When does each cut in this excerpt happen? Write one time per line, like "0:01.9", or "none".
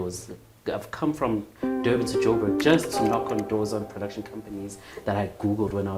none